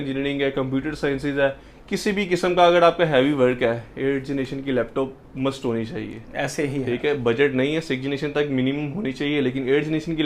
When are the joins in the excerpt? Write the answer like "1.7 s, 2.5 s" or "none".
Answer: none